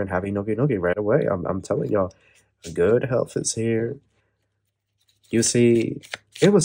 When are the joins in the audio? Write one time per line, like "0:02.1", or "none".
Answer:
none

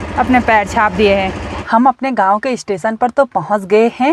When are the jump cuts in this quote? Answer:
0:01.5

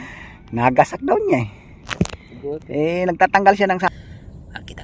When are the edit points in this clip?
0:03.9

